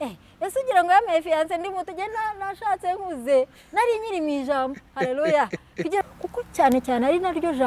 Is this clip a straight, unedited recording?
no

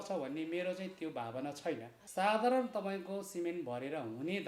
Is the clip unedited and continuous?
no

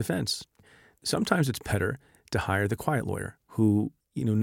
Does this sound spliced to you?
yes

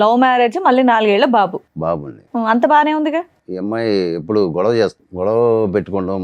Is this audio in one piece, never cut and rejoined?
no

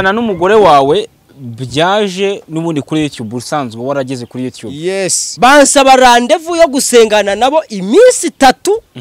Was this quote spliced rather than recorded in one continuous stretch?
yes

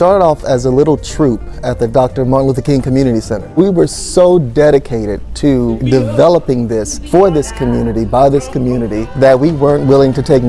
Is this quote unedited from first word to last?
no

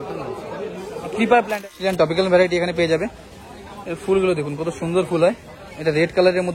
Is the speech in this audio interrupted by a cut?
yes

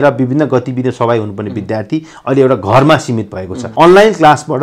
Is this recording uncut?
no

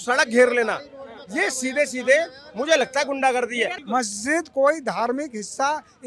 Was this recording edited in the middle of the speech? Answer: yes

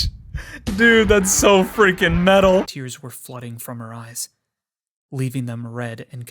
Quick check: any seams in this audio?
yes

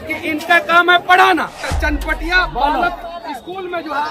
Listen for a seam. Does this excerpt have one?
yes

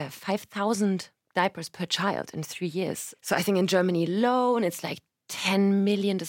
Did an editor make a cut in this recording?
yes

